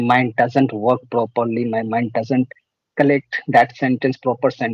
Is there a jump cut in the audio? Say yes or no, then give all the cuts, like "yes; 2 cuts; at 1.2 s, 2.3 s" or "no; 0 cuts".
no; 0 cuts